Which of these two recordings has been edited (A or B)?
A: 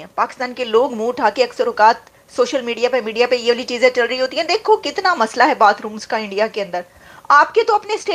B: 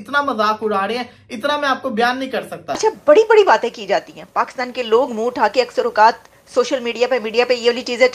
B